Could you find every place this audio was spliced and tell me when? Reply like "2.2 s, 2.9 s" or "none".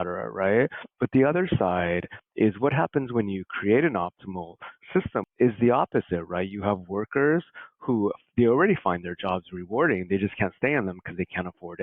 5.3 s